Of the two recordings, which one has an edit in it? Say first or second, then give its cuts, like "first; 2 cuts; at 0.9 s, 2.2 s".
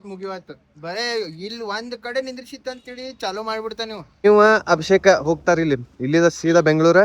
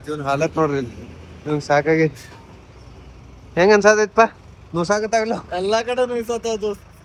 first; 1 cut; at 4.2 s